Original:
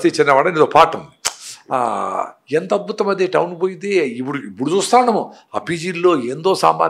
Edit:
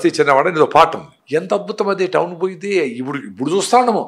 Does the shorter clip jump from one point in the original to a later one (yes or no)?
yes